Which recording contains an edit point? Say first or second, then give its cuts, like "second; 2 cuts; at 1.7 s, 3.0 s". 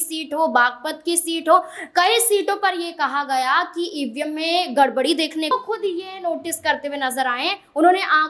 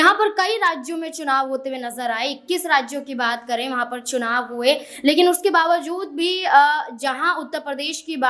first; 1 cut; at 5.5 s